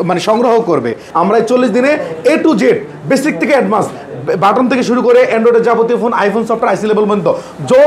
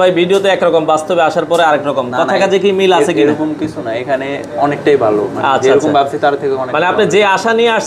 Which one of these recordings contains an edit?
first; 1 cut; at 1.0 s

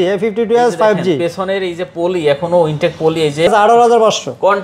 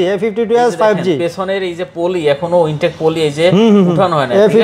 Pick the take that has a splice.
first; 1 cut; at 3.5 s

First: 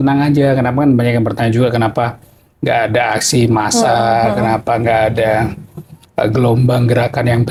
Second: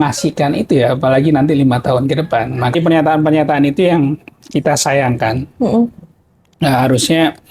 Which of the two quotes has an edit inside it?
second; 1 cut; at 2.7 s

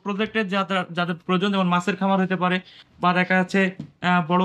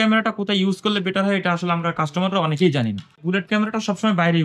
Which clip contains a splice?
second; 1 cut; at 3.2 s

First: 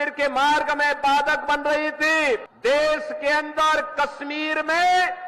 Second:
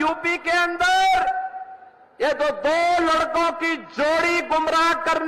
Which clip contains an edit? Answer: first; 1 cut; at 2.5 s

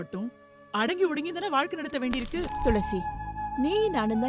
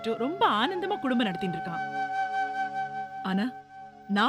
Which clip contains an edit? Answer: first; 1 cut; at 2.5 s

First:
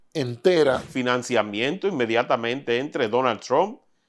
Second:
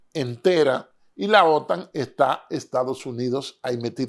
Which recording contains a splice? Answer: first; 1 cut; at 0.9 s

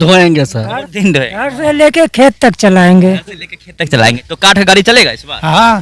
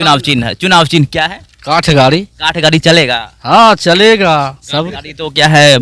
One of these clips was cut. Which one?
first; 1 cut; at 4.3 s

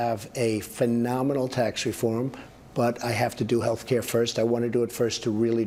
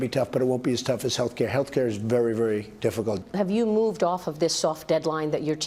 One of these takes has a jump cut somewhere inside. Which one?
second; 1 cut; at 3.0 s

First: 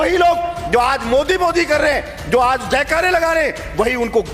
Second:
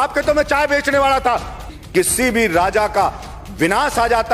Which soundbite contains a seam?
second; 1 cut; at 1.7 s

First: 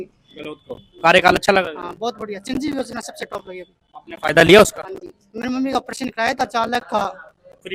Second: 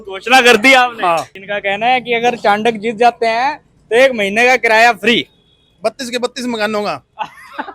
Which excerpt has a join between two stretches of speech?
second; 1 cut; at 1.3 s

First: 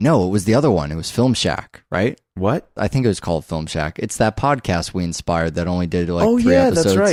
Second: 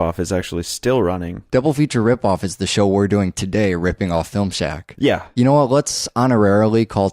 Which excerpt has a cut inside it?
second; 1 cut; at 1.0 s

